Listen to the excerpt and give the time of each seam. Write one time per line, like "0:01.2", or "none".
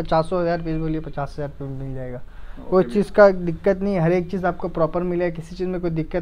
none